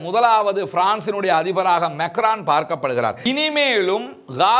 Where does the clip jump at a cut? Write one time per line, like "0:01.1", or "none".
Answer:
0:03.2